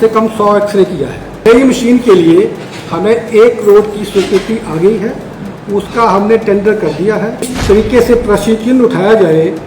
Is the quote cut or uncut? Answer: cut